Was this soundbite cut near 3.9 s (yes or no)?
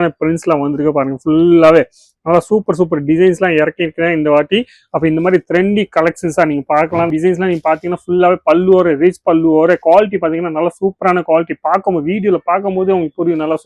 no